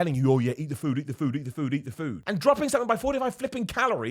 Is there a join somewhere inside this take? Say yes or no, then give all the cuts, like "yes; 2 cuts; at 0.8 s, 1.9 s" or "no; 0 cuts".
yes; 1 cut; at 2.2 s